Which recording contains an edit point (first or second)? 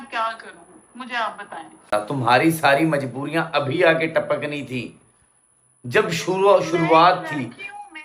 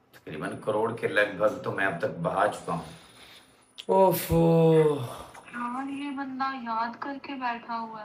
first